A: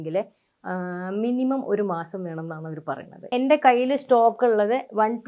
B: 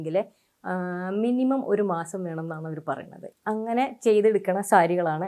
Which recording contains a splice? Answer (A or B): A